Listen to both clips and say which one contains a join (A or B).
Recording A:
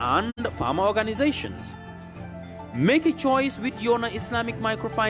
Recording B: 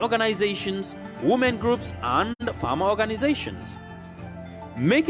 A